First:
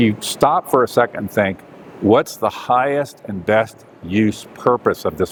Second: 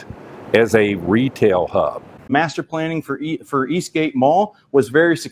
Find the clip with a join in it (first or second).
second